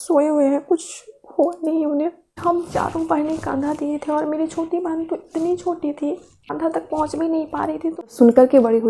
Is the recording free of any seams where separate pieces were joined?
no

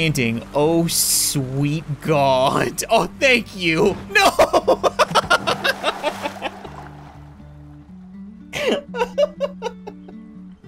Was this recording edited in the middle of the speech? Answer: yes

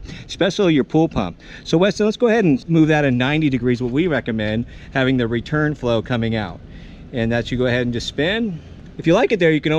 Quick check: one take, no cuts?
no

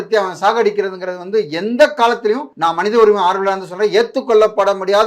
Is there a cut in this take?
yes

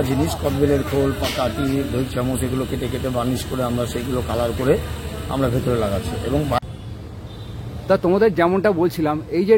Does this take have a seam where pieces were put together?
yes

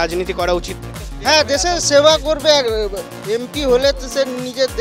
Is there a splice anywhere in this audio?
no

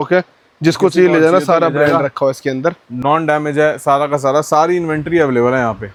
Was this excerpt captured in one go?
yes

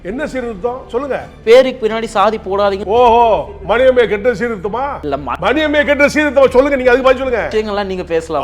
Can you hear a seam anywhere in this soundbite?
yes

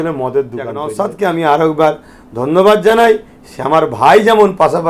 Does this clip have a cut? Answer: yes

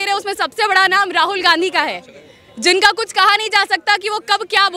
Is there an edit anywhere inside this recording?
no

